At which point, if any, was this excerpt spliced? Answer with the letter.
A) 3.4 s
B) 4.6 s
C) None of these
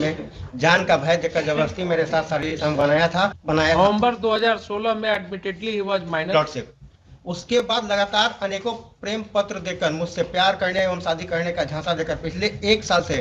A